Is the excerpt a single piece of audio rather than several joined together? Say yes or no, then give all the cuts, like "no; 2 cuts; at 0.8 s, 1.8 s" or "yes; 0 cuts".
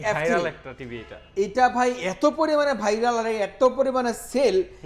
yes; 0 cuts